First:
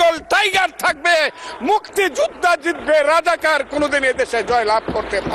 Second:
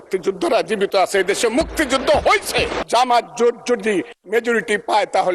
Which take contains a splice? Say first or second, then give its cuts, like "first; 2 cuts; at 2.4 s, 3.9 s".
second; 1 cut; at 2.8 s